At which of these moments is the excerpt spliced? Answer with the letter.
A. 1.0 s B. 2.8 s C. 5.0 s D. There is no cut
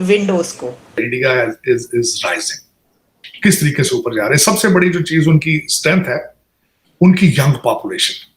A